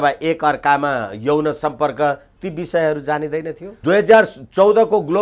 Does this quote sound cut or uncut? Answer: cut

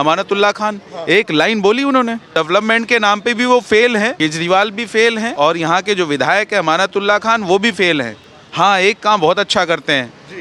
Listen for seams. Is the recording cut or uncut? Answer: cut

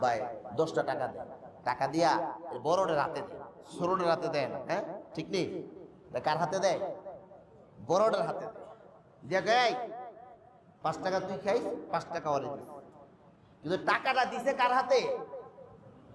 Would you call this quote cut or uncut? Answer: uncut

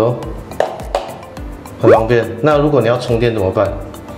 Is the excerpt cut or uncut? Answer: uncut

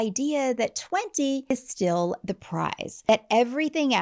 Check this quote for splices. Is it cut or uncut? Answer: cut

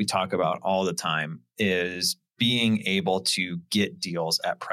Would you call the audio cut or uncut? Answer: uncut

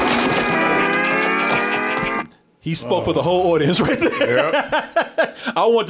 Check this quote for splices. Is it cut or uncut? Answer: uncut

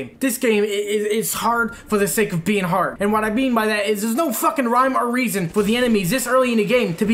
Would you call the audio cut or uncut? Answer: uncut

